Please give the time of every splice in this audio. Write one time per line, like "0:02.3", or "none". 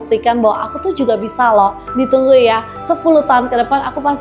0:01.9
0:02.7